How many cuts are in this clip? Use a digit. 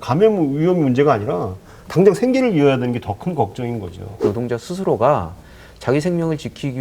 1